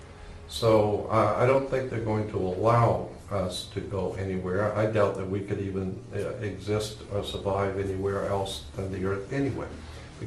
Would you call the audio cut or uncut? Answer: uncut